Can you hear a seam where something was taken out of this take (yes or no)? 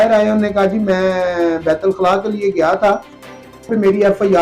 yes